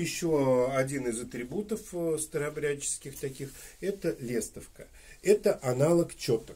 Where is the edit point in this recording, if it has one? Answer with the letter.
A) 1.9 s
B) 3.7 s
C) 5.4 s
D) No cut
D